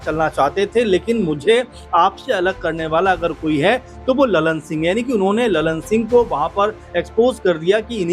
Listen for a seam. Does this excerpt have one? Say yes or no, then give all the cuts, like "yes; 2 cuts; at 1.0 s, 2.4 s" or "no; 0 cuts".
no; 0 cuts